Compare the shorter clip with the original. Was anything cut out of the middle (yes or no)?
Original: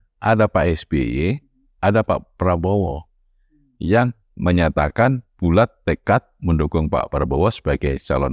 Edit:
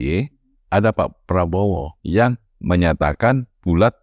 yes